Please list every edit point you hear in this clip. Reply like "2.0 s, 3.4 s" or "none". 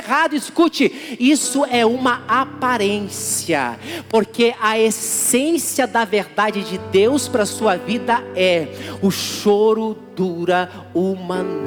none